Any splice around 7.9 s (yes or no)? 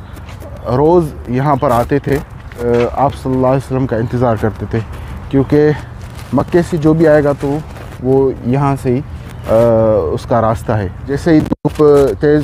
no